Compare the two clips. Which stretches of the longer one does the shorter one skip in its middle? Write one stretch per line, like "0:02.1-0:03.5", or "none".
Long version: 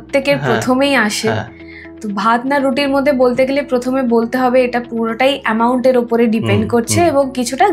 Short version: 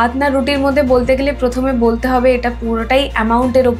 none